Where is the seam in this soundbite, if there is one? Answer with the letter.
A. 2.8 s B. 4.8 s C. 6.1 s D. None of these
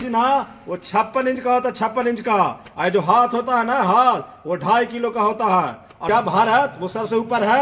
C